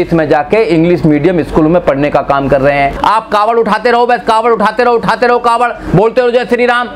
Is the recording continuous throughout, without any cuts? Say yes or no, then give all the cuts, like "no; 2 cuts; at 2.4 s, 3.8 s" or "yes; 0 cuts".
no; 1 cut; at 3.0 s